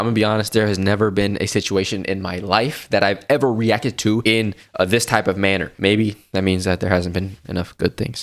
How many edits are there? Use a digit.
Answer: 2